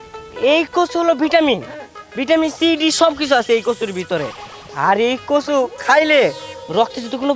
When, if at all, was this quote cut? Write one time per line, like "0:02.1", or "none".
none